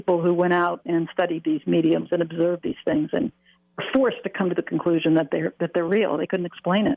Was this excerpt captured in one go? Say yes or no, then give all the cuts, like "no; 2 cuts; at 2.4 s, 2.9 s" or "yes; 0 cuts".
yes; 0 cuts